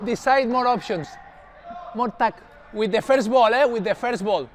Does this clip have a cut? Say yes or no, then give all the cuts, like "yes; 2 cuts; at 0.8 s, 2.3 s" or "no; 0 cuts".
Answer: no; 0 cuts